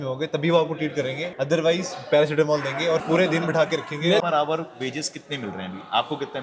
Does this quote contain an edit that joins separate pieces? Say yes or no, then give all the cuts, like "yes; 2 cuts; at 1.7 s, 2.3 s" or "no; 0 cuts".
yes; 3 cuts; at 1.3 s, 3.0 s, 4.2 s